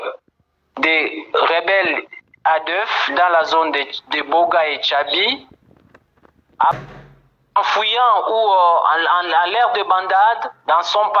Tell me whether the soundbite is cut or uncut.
cut